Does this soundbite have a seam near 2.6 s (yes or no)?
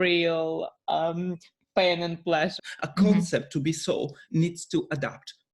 yes